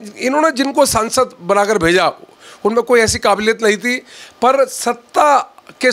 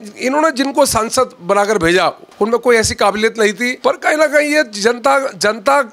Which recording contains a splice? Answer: second; 2 cuts; at 2.2 s, 3.7 s

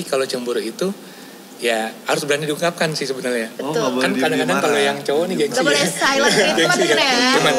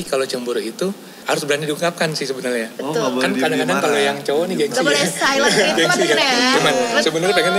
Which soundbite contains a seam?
second; 1 cut; at 1.2 s

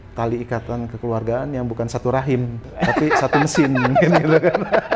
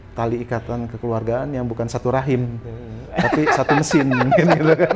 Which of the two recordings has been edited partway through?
first; 1 cut; at 2.6 s

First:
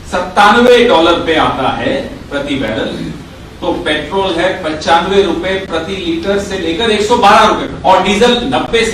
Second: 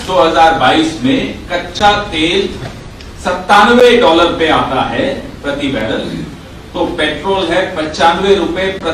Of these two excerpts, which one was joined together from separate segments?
first; 1 cut; at 7.7 s

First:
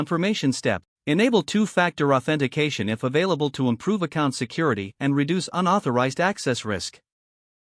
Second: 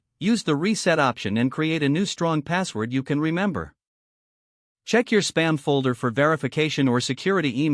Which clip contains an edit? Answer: first; 1 cut; at 0.9 s

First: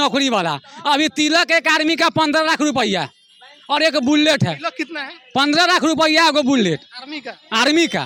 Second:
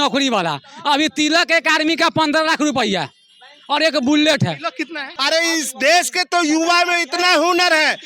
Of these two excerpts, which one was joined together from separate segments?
second; 1 cut; at 5.1 s

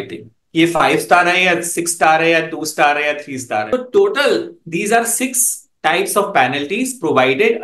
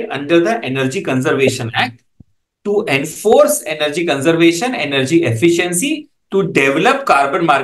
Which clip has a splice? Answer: first; 1 cut; at 3.6 s

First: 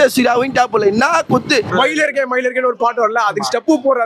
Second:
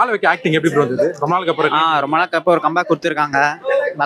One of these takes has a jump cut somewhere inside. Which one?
first; 1 cut; at 1.7 s

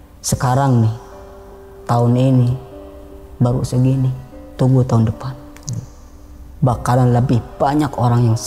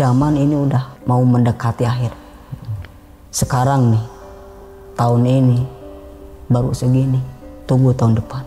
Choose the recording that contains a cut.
second; 1 cut; at 0.9 s

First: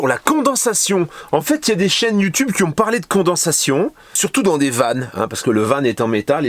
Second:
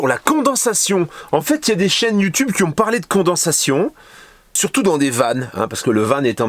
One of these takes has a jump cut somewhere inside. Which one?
first; 1 cut; at 4.1 s

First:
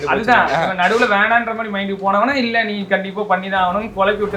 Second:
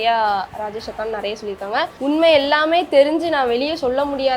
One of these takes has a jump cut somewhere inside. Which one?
second; 1 cut; at 1.9 s

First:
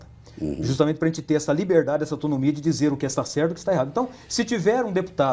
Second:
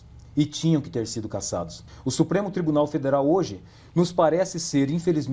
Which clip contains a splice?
second; 1 cut; at 1.8 s

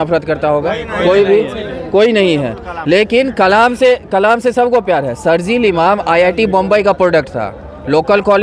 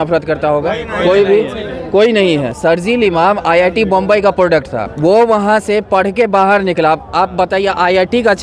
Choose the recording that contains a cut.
second; 2 cuts; at 2.5 s, 4.8 s

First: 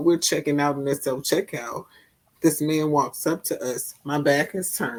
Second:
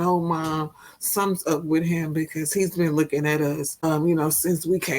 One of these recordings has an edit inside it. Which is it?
second; 1 cut; at 3.7 s

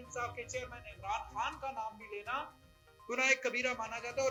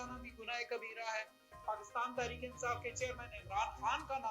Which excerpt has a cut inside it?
second; 1 cut; at 1.6 s

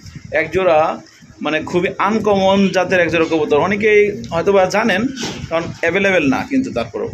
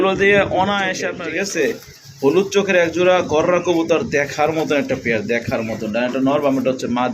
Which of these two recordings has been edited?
second; 1 cut; at 1.1 s

